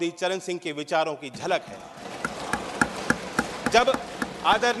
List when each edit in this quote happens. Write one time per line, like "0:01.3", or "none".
none